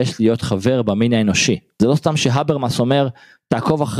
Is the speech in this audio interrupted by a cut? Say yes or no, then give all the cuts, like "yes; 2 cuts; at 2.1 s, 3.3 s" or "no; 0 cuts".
yes; 1 cut; at 1.7 s